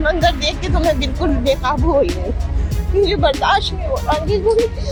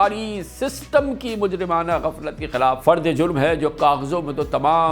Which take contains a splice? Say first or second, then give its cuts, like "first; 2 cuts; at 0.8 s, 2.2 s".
second; 1 cut; at 2.8 s